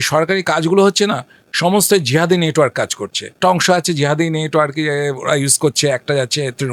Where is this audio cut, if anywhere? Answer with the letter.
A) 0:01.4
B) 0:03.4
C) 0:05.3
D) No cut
B